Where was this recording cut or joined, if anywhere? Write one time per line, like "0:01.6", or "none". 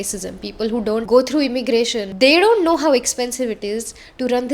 0:01.0
0:02.0